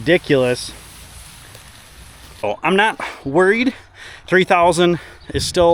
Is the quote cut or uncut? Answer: cut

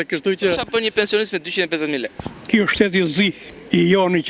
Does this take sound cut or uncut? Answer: cut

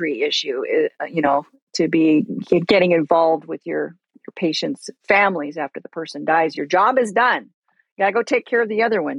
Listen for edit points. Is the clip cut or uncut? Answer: uncut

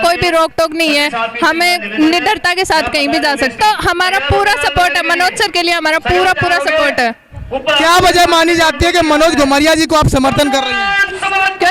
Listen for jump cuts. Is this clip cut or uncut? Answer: uncut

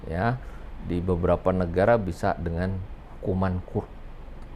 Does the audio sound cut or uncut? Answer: uncut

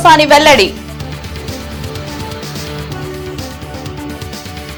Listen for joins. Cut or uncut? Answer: uncut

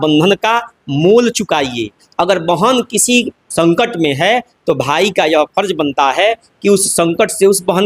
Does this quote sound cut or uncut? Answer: uncut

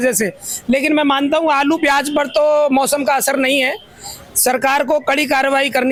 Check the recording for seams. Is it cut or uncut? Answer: uncut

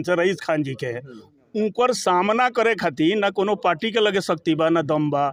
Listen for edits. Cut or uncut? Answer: uncut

